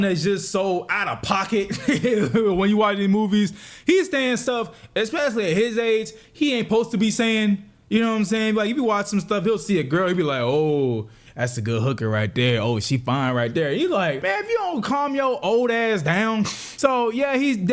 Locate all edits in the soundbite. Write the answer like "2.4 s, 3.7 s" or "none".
14.2 s, 16.6 s